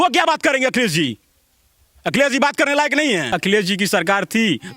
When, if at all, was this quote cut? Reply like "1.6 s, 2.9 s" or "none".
3.4 s